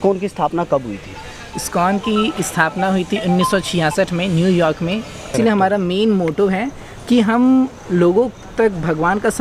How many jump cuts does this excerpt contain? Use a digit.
1